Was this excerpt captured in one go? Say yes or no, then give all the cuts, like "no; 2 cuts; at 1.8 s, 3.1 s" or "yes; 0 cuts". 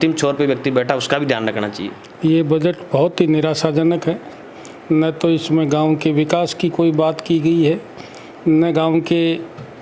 no; 1 cut; at 2.0 s